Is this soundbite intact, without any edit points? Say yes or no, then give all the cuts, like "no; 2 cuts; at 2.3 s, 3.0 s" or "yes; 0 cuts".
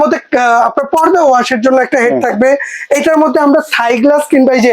yes; 0 cuts